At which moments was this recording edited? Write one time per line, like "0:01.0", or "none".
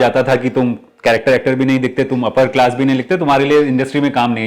none